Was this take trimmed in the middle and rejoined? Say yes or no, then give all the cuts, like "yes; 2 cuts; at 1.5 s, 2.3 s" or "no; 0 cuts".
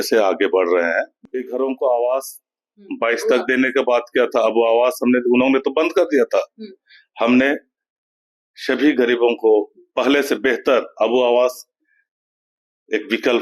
yes; 1 cut; at 1.2 s